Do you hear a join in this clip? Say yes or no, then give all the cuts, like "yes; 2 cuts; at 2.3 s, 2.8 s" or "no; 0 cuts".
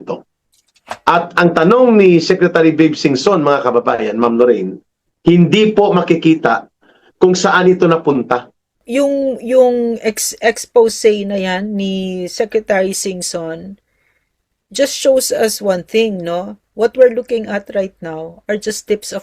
yes; 1 cut; at 8.8 s